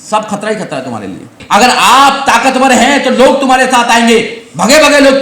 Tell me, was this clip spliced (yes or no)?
yes